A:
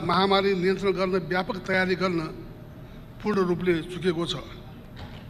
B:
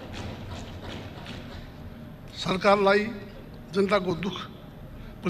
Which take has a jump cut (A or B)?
B